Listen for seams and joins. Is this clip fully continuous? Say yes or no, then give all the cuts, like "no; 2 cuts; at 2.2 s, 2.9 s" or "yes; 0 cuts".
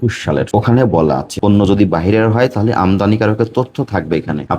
no; 1 cut; at 1.3 s